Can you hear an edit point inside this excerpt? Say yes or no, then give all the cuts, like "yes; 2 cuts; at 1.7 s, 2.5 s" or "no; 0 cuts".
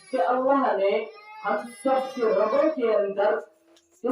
no; 0 cuts